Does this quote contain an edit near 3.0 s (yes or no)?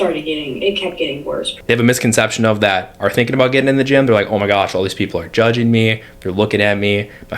no